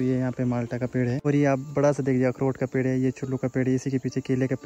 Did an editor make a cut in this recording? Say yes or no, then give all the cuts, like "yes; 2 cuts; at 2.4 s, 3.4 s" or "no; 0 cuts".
yes; 1 cut; at 1.2 s